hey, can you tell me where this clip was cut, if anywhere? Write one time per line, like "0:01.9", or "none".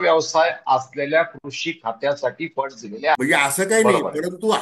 0:03.1